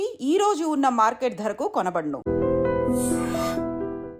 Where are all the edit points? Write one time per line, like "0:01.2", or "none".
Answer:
0:02.2